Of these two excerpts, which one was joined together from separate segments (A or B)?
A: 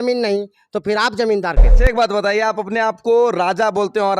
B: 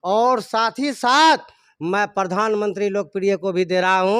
A